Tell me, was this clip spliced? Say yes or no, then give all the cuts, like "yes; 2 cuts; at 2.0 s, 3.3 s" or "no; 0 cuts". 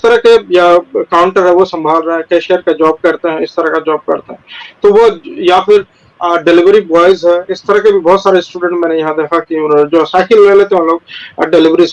no; 0 cuts